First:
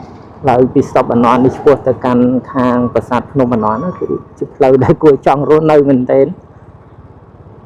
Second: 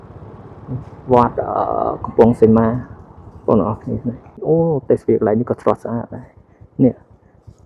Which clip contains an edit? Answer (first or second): second